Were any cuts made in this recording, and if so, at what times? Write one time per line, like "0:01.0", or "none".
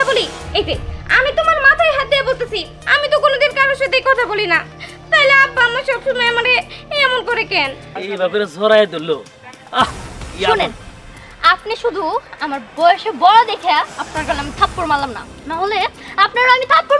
0:07.9

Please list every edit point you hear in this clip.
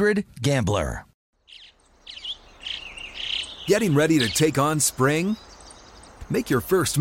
0:01.3

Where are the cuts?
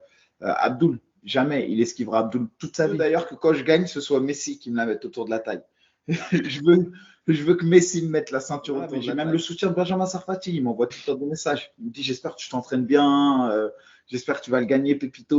0:03.0
0:09.0

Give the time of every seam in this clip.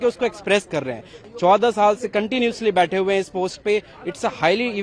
0:01.2

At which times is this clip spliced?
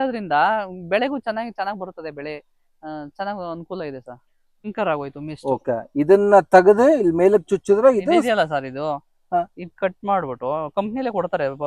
0:04.7

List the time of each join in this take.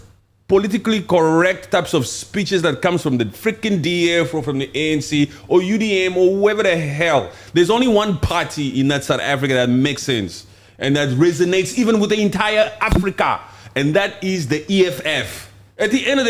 none

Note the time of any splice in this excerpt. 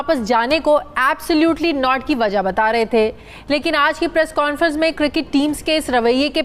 none

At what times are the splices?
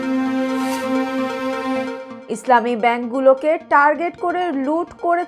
0:02.1

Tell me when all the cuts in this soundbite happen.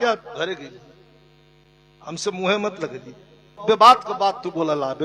0:03.6

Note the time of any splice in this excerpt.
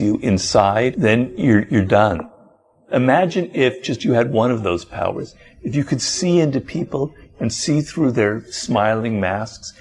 0:00.9
0:02.6

